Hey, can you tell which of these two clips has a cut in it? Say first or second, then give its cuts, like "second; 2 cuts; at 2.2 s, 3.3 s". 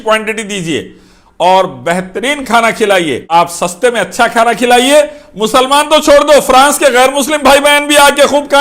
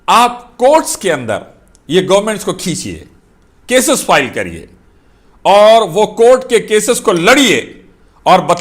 first; 1 cut; at 3.3 s